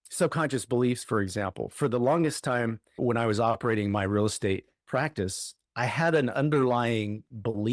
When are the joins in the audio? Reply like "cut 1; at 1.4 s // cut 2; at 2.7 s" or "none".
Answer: cut 1; at 2.8 s